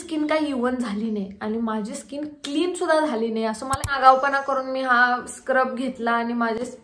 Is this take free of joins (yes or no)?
no